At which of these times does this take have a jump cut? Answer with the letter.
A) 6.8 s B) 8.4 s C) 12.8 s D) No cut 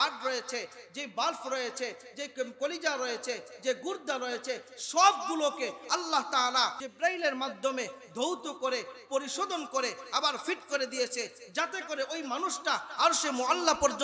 A